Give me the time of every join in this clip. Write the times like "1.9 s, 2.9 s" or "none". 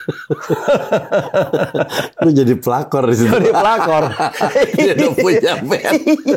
none